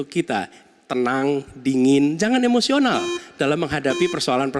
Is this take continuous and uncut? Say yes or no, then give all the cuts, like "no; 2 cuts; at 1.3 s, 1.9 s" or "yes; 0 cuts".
yes; 0 cuts